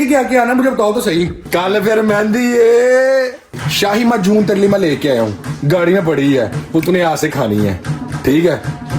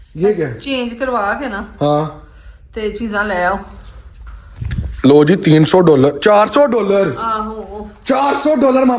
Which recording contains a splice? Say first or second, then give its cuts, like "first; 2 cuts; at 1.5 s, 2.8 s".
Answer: first; 3 cuts; at 1.4 s, 3.6 s, 5.5 s